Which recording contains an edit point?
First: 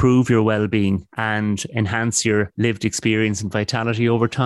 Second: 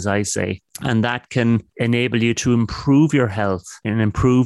second; 1 cut; at 1.7 s

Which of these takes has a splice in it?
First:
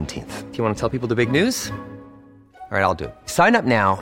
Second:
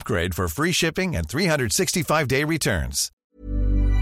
second; 1 cut; at 3.1 s

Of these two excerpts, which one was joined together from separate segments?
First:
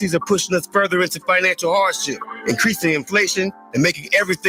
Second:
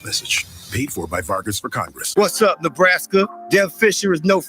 second; 1 cut; at 1.9 s

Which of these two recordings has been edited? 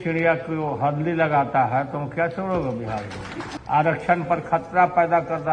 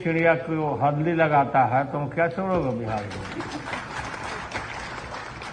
first; 1 cut; at 3.6 s

